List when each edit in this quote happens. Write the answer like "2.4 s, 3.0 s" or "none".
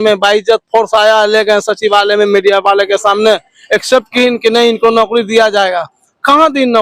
none